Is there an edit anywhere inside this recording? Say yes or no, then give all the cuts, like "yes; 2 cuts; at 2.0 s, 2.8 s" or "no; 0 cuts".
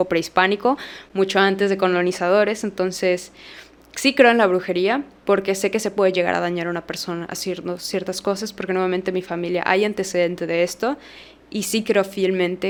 no; 0 cuts